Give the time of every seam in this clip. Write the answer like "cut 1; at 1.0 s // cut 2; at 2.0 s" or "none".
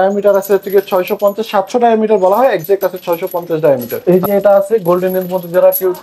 cut 1; at 3.9 s